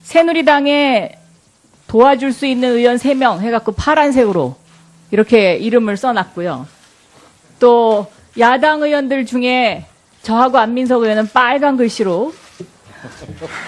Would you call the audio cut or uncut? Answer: uncut